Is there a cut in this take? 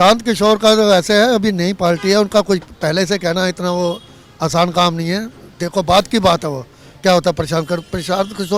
no; 0 cuts

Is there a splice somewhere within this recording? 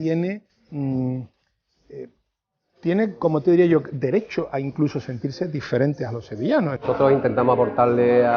yes; 1 cut; at 6.8 s

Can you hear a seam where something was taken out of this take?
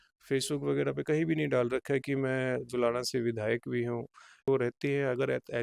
yes; 1 cut; at 4.5 s

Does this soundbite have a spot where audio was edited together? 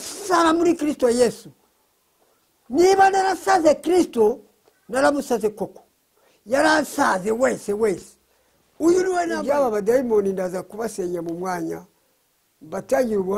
yes; 1 cut; at 9.4 s

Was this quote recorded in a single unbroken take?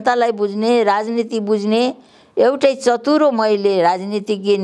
yes; 0 cuts

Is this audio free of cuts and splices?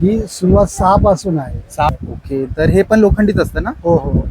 no; 1 cut; at 1.9 s

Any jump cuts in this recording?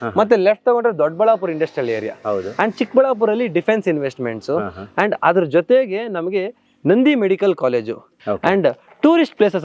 yes; 1 cut; at 8.1 s

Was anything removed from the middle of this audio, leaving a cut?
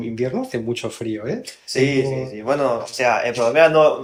no; 0 cuts

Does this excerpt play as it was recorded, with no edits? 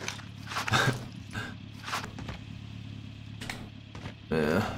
no; 1 cut; at 2.0 s

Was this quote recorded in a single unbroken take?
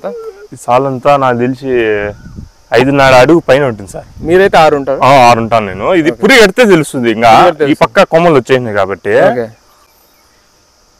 yes; 0 cuts

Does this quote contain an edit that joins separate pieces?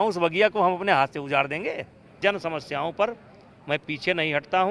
yes; 1 cut; at 2.2 s

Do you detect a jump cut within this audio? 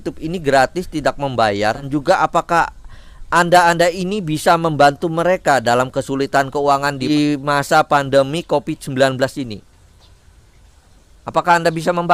no; 0 cuts

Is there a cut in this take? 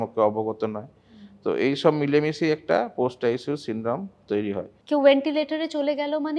yes; 1 cut; at 4.7 s

